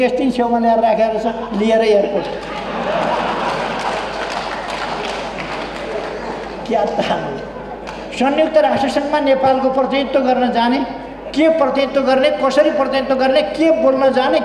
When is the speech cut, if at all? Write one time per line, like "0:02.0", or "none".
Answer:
none